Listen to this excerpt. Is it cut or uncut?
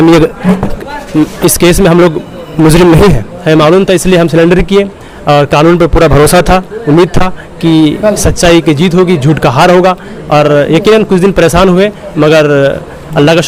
uncut